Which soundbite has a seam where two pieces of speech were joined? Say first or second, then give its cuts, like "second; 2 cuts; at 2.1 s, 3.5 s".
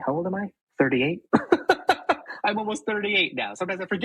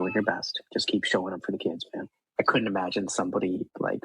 second; 1 cut; at 2.3 s